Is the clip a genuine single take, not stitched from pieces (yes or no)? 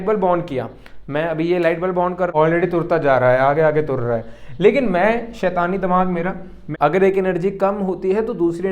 no